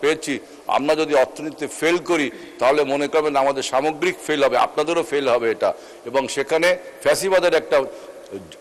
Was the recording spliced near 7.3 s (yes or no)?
no